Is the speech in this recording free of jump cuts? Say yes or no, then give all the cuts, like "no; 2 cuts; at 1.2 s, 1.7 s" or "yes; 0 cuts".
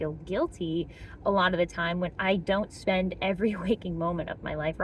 yes; 0 cuts